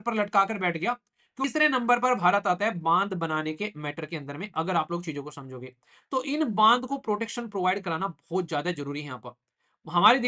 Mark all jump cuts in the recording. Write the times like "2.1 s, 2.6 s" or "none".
1.4 s